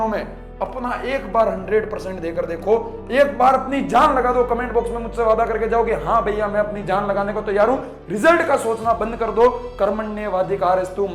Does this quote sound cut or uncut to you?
uncut